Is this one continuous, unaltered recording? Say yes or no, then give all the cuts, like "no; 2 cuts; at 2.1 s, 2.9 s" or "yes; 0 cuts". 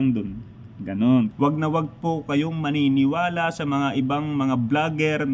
no; 1 cut; at 1.3 s